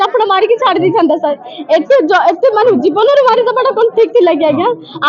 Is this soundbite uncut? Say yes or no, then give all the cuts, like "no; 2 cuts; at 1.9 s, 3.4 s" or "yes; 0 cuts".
yes; 0 cuts